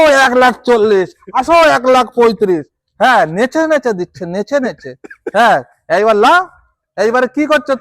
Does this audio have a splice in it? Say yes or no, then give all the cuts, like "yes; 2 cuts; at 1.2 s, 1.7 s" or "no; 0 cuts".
no; 0 cuts